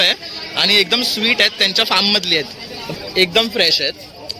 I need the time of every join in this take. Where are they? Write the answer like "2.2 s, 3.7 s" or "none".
2.9 s